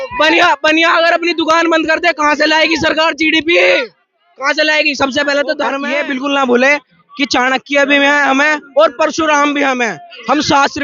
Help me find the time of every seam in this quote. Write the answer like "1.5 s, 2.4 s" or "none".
5.9 s